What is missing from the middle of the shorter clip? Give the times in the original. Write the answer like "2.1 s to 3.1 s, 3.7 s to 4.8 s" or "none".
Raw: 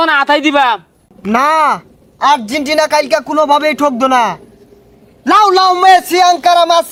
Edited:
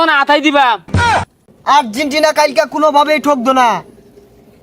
1.2 s to 1.8 s